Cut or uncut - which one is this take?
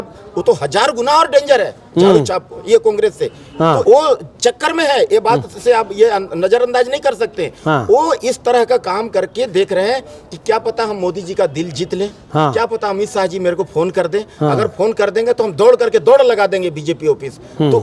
cut